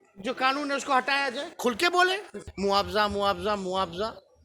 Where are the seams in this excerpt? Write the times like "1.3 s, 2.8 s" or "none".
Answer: 2.4 s

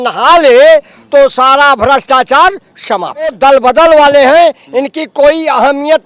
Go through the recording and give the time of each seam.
3.3 s

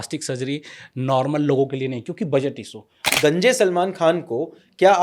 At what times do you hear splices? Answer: 3.1 s

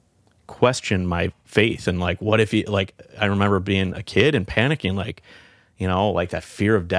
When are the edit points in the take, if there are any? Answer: none

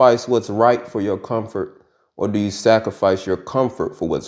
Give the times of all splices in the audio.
none

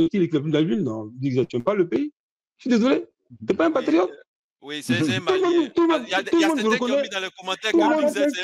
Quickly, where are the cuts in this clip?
none

